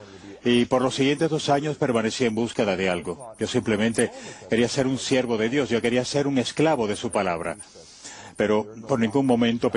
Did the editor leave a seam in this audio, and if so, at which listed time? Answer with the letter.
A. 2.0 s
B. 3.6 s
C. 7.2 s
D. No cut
C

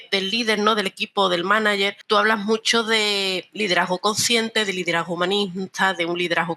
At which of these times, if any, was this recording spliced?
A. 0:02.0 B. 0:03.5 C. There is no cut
A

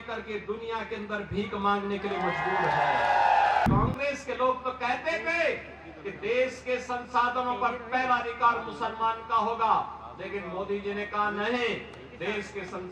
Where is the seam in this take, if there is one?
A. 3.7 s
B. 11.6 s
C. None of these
A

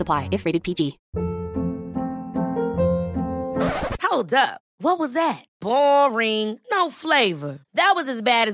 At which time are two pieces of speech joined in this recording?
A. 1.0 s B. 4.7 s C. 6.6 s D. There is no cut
A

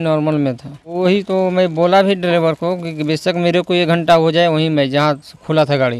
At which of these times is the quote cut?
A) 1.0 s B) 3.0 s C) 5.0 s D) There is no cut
A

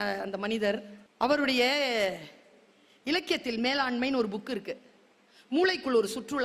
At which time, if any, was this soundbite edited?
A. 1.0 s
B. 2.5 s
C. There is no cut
A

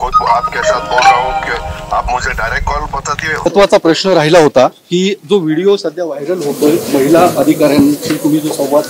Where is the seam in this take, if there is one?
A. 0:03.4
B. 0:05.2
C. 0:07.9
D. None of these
A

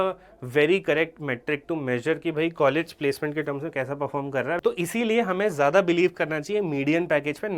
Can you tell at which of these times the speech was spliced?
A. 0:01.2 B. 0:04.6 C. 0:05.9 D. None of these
B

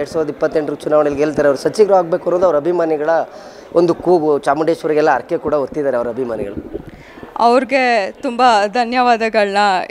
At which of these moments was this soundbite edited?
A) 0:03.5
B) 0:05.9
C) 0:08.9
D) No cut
D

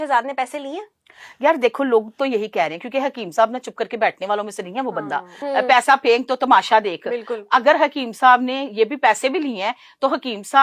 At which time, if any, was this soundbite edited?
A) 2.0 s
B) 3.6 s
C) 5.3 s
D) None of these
C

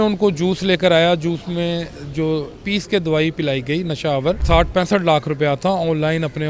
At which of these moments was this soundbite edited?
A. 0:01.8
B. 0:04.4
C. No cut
B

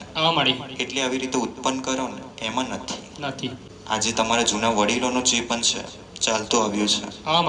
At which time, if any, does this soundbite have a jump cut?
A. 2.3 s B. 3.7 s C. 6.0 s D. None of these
B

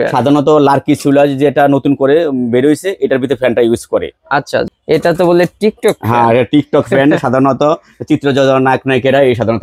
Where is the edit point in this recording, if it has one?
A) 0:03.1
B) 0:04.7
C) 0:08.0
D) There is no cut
B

